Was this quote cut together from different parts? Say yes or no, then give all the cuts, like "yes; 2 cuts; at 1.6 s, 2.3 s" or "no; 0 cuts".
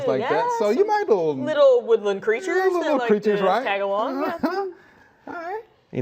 no; 0 cuts